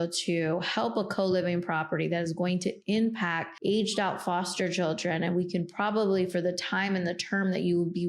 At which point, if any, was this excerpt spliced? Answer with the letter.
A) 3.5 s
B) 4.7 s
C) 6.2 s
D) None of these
A